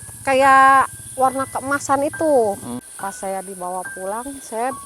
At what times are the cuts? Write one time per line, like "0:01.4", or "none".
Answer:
0:02.7